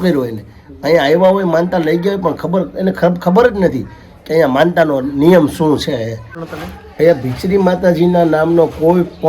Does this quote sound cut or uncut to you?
cut